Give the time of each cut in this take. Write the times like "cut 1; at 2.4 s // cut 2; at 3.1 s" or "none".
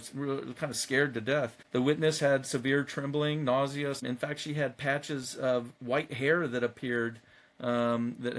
cut 1; at 1.6 s // cut 2; at 4.0 s